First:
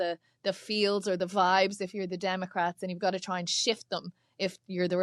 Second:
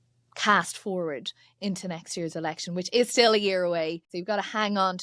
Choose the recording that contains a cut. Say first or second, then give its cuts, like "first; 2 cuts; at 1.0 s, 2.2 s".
second; 1 cut; at 4.1 s